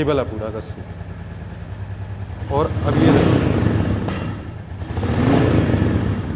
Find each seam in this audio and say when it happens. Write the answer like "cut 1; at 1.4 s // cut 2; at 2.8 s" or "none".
none